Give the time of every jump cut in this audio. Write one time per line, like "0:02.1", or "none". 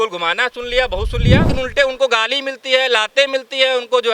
0:01.5